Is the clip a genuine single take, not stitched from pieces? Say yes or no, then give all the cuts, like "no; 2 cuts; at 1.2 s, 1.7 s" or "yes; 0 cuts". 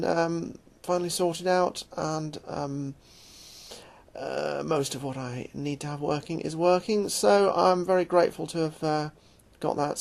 yes; 0 cuts